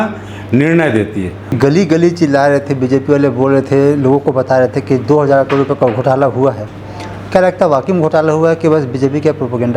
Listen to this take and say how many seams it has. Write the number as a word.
one